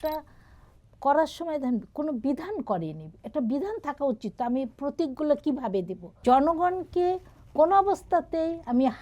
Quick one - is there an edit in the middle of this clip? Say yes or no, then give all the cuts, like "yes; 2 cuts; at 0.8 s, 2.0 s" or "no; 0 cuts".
yes; 1 cut; at 6.2 s